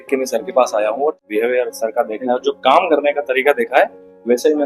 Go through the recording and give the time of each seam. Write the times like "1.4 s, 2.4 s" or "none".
1.2 s